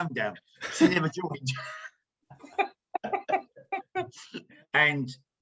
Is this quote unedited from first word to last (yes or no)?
no